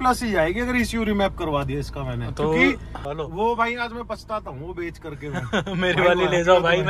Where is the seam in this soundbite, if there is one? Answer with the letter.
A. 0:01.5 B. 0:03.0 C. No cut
B